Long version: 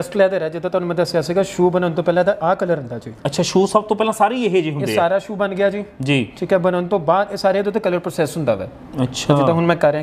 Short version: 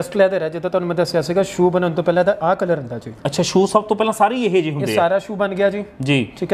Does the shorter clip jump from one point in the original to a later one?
no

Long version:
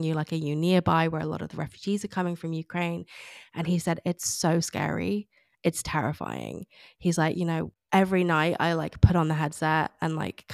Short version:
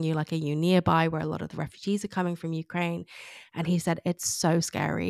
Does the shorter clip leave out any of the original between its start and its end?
no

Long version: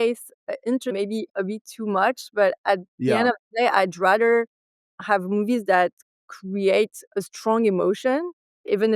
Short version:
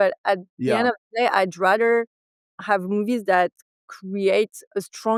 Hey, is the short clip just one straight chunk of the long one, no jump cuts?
yes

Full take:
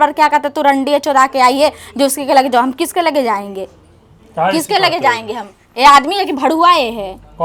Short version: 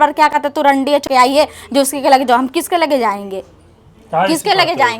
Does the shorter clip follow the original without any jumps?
no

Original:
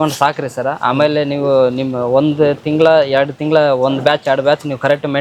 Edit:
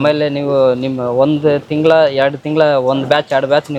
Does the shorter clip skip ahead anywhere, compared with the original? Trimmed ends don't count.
no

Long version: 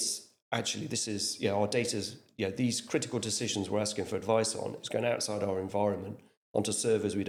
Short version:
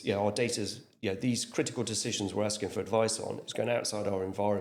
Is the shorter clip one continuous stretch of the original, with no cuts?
yes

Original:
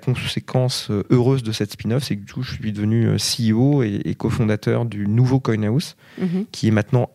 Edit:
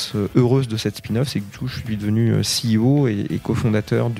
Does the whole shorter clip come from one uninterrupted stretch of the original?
yes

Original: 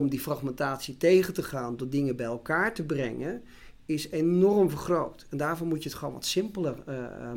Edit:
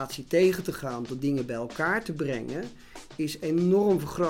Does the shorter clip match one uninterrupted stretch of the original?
yes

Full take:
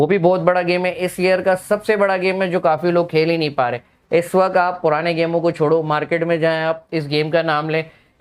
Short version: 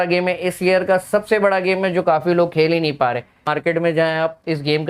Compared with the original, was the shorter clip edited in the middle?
yes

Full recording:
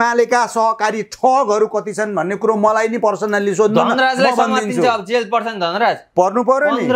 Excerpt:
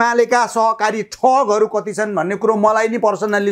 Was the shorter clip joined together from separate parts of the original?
no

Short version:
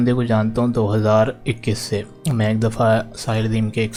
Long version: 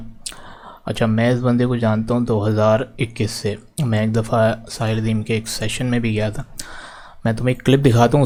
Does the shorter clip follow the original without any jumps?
yes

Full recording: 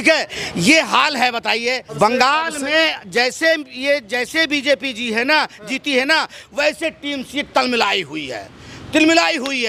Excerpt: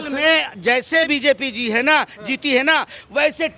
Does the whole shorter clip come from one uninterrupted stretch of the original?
no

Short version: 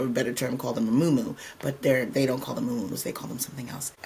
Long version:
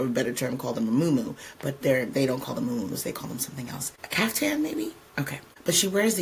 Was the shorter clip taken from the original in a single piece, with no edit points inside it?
yes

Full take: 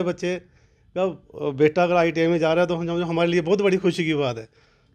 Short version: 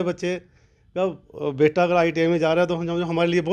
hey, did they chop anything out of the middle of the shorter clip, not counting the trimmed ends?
no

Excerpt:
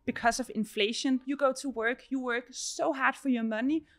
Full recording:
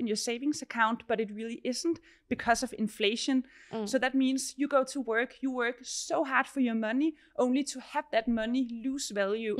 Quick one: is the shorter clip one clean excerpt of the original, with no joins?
no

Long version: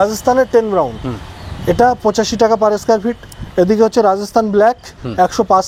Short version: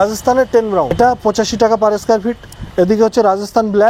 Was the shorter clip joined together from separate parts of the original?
yes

